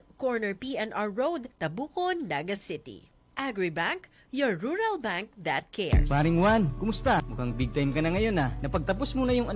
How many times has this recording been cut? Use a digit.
1